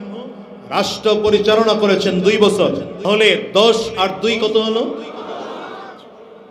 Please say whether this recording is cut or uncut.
cut